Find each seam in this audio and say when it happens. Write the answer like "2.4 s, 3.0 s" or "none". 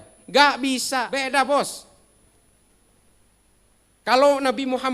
1.1 s